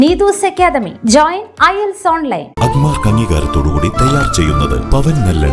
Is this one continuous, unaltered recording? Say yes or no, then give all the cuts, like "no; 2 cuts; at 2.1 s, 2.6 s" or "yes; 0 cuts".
yes; 0 cuts